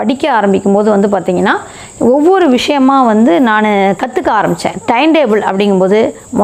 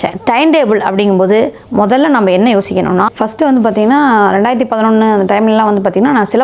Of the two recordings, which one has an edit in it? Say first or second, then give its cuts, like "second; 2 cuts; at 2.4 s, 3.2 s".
second; 1 cut; at 3.1 s